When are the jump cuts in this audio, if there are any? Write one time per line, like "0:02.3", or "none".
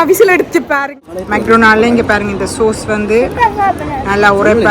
0:01.1

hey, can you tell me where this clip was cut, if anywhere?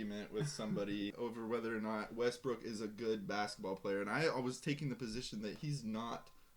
0:01.1

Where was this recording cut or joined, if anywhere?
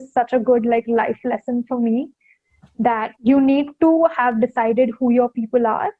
0:03.1

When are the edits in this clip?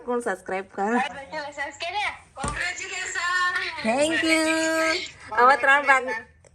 0:01.2

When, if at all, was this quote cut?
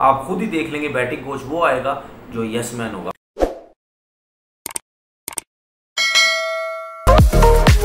0:03.2

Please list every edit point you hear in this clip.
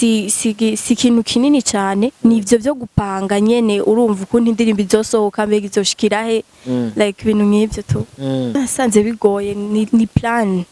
0:08.6

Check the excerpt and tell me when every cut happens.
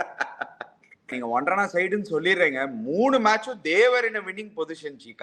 0:01.1

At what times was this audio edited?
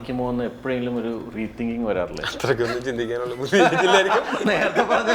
none

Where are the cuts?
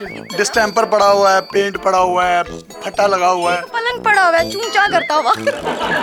none

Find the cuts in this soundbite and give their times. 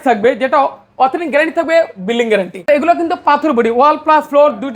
0:02.7

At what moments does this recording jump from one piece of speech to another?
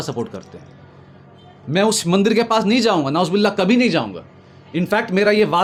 none

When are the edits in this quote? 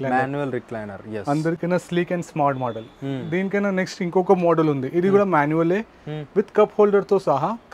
none

